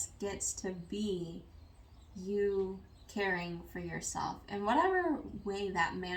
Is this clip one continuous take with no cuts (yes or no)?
yes